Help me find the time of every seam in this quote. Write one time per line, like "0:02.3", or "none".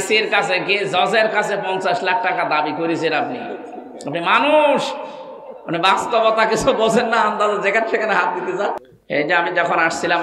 0:08.9